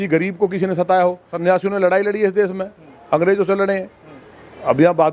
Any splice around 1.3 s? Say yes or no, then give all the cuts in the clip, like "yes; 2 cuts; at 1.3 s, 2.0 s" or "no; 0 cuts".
yes; 1 cut; at 1.3 s